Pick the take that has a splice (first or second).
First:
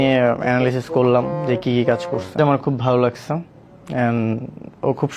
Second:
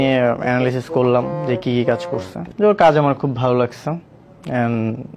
first